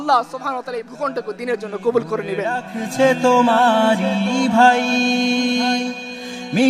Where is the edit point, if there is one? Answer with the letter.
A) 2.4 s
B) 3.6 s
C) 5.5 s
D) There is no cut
A